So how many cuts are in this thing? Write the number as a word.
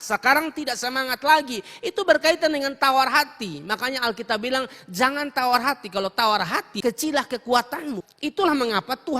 two